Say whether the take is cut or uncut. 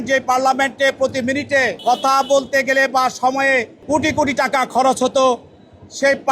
cut